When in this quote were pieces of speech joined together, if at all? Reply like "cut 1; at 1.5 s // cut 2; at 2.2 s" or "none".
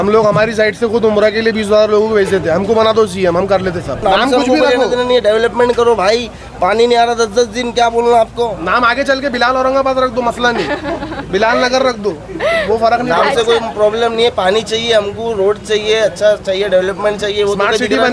cut 1; at 4.0 s